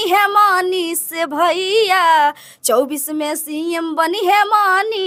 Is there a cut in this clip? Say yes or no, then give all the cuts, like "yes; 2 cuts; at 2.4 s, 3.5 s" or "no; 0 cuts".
no; 0 cuts